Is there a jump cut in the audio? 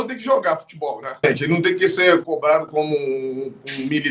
yes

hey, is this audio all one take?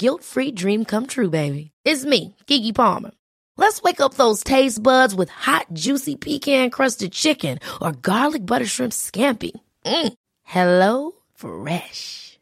yes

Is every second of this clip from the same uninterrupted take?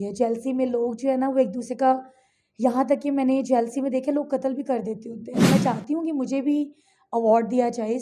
no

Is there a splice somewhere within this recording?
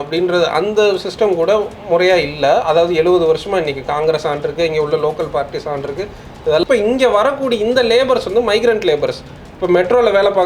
yes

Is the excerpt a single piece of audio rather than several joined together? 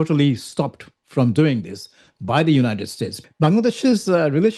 no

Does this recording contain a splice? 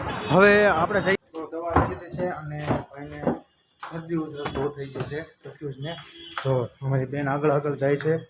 yes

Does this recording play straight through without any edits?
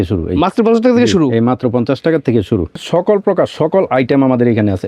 no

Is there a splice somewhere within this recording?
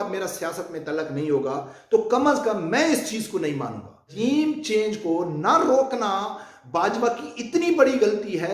yes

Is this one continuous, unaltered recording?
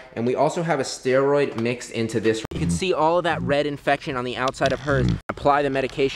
no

